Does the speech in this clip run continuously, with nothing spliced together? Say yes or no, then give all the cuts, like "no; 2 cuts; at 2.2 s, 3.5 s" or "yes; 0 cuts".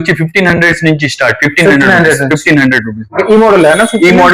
yes; 0 cuts